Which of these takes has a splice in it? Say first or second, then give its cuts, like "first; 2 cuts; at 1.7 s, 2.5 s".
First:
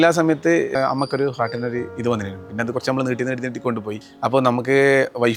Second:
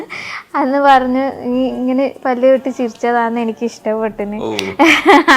first; 2 cuts; at 0.7 s, 3.9 s